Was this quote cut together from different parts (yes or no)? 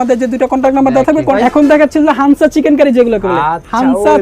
yes